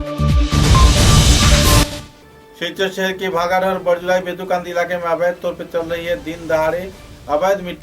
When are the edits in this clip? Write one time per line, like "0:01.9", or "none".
0:01.8